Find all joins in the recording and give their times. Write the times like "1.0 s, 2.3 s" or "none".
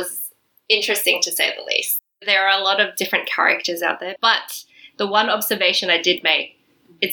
2.1 s, 4.1 s